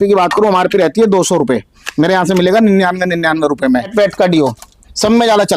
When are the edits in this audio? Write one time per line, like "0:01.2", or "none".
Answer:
0:03.9